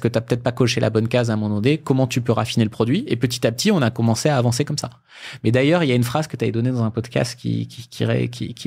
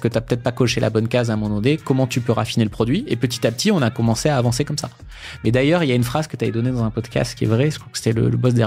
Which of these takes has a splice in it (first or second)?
second